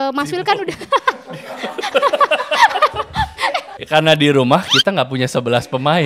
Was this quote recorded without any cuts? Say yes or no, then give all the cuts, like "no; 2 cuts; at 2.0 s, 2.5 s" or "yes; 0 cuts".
no; 1 cut; at 3.8 s